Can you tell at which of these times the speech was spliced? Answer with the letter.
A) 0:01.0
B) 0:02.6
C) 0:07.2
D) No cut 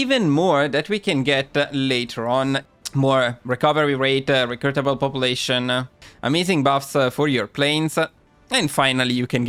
D